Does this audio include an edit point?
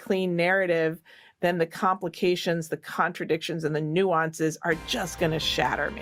no; 0 cuts

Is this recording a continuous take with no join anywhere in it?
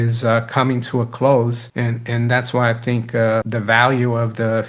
no; 1 cut; at 3.5 s

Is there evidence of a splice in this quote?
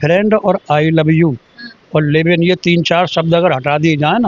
no; 0 cuts

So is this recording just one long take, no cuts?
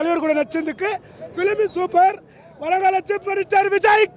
yes; 0 cuts

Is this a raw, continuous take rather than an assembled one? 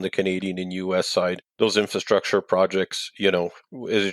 no; 1 cut; at 1.4 s

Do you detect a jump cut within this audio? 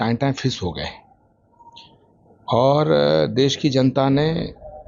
no; 0 cuts

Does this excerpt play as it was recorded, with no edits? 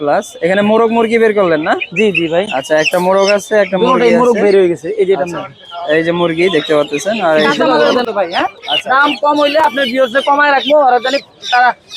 no; 1 cut; at 7.9 s

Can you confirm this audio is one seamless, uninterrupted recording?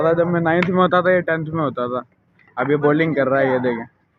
yes; 0 cuts

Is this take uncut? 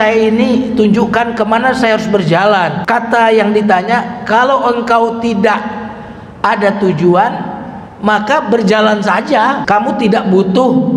no; 2 cuts; at 2.8 s, 9.6 s

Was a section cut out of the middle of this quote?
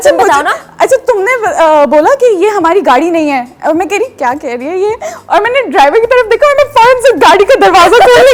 no; 0 cuts

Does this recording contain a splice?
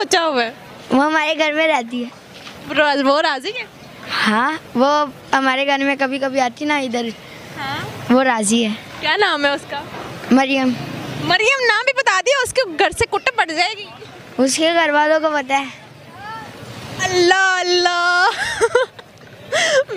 no; 0 cuts

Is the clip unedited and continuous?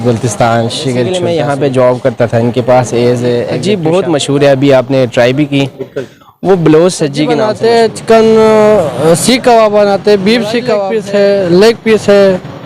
no; 4 cuts; at 1.2 s, 3.5 s, 7.4 s, 10.9 s

